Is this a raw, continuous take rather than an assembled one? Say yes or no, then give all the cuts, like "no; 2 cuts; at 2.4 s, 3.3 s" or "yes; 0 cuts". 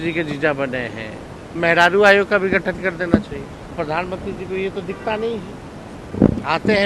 no; 3 cuts; at 1.4 s, 3.7 s, 5.9 s